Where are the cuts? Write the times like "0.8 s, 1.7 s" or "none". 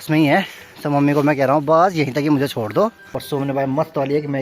3.1 s